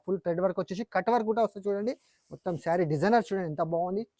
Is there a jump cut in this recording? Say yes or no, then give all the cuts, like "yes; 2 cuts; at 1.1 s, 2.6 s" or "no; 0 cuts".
no; 0 cuts